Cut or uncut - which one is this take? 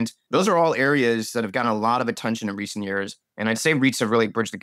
uncut